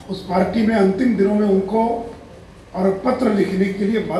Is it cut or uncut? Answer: uncut